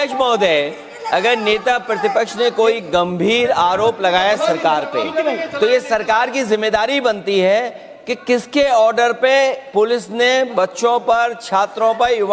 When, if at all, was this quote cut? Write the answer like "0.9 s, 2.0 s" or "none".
none